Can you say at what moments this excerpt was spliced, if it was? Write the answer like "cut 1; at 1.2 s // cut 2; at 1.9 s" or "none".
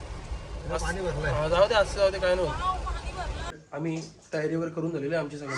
cut 1; at 3.6 s